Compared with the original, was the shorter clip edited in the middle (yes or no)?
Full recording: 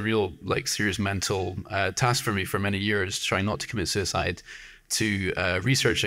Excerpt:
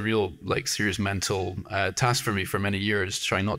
no